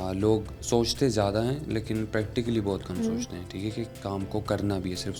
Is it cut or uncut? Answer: uncut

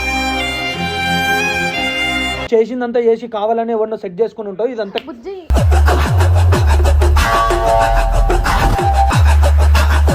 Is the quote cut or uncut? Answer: cut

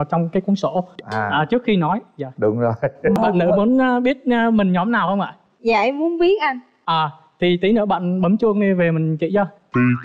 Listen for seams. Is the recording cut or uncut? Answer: cut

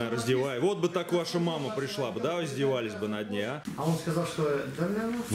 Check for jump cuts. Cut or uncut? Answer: cut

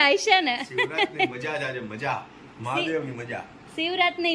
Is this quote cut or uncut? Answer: uncut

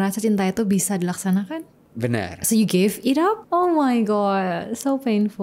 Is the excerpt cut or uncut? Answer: uncut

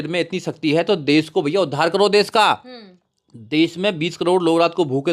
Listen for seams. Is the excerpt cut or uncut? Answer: uncut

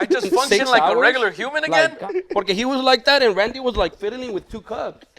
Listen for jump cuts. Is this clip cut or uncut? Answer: cut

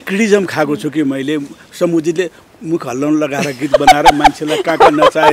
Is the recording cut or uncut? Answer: uncut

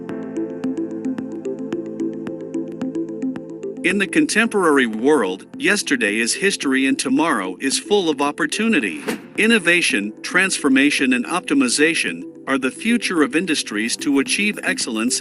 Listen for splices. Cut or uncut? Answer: cut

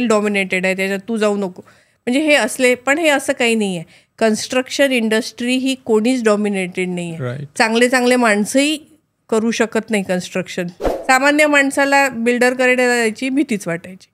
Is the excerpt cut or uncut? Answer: cut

